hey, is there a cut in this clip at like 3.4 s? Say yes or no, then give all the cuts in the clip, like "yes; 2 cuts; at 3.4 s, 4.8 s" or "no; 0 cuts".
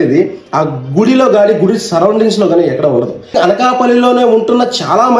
yes; 1 cut; at 3.4 s